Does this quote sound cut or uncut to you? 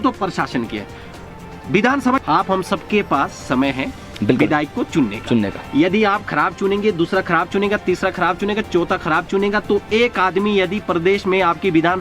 cut